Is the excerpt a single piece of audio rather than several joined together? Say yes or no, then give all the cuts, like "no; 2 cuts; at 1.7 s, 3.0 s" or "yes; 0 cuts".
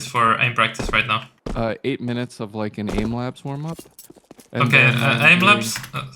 no; 1 cut; at 1.3 s